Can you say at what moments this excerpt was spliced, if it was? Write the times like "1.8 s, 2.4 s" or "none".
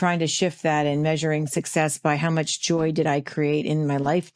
none